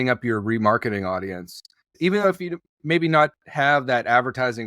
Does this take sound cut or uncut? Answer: cut